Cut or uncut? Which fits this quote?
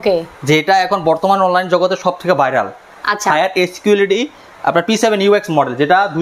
uncut